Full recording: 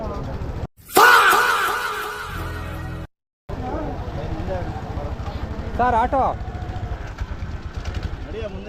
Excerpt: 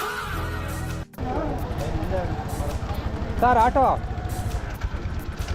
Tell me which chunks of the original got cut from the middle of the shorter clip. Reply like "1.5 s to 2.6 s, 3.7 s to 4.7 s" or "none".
3.2 s to 3.6 s